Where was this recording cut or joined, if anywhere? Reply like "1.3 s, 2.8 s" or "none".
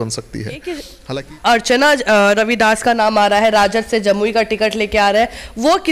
0.9 s